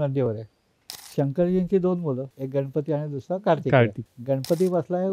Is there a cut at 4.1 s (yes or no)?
yes